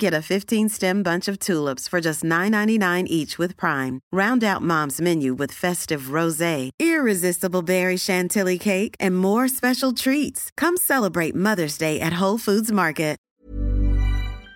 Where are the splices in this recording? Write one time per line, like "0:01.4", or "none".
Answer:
0:13.3